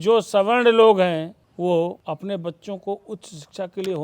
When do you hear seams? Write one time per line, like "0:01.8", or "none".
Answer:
0:01.4
0:02.0